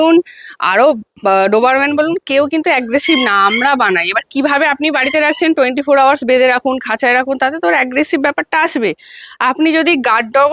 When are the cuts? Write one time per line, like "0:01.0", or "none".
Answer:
none